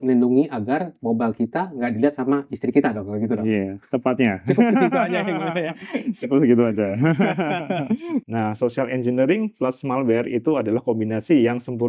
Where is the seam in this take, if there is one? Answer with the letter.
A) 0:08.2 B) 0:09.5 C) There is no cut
A